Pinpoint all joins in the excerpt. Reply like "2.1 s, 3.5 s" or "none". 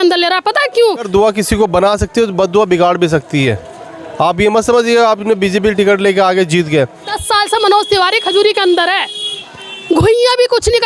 1.1 s, 7.2 s